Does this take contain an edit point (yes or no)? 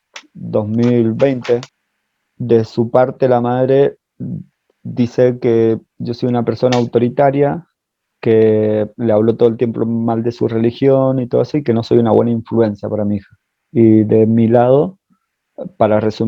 yes